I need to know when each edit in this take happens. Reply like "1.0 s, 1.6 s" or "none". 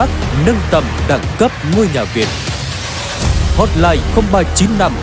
none